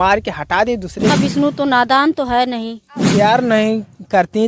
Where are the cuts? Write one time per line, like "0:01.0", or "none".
0:01.1
0:03.1